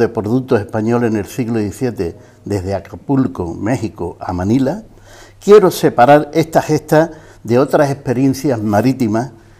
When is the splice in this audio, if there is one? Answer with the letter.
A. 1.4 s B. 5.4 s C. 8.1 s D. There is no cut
C